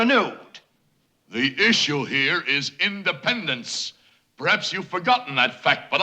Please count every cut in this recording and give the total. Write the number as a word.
one